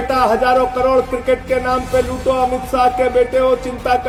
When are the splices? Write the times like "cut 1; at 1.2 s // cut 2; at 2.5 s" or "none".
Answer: none

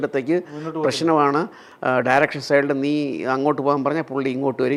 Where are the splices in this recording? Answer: none

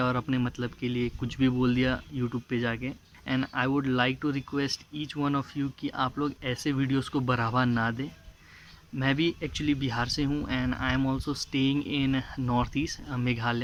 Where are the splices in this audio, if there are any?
none

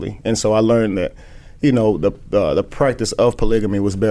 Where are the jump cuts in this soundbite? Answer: none

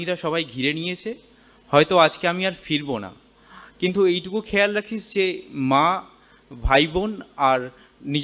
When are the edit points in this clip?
none

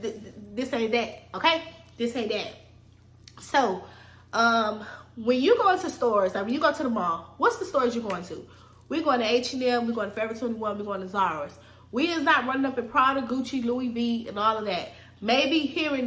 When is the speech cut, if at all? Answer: none

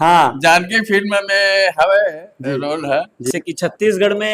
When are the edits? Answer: cut 1; at 3.3 s

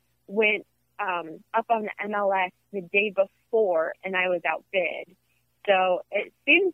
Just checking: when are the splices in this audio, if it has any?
cut 1; at 4.0 s

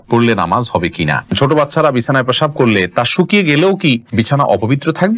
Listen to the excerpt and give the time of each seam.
cut 1; at 1.3 s // cut 2; at 4.1 s

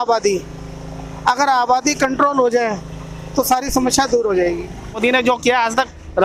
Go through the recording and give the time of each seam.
cut 1; at 5.0 s

